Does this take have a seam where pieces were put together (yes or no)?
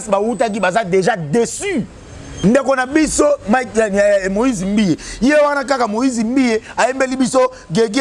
yes